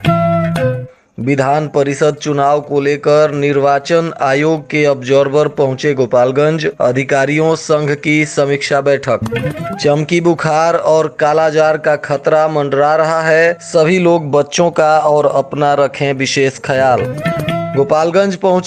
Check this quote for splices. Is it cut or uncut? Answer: cut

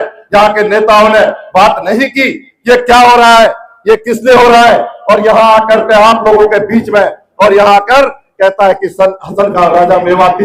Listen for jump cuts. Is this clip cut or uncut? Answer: uncut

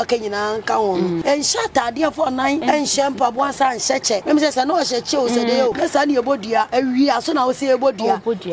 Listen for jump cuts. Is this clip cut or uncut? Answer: cut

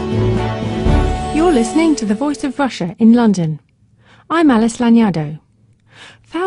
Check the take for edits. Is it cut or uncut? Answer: cut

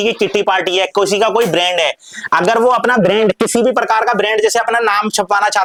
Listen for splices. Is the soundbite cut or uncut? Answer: uncut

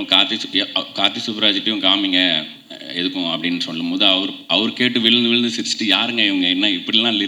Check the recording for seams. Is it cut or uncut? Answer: uncut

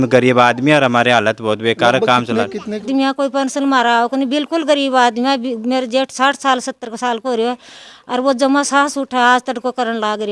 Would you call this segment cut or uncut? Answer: cut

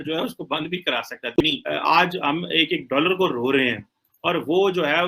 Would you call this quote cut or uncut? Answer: cut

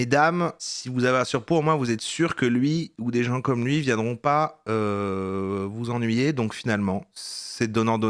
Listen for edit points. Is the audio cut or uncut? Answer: uncut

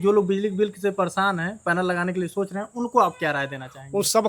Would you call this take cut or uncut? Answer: uncut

